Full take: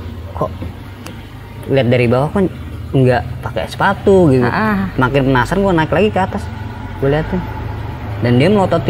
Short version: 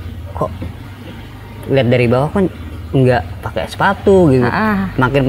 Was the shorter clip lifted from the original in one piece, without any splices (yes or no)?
yes